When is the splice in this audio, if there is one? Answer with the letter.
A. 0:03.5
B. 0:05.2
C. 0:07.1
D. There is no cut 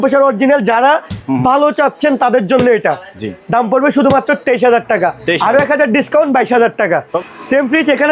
C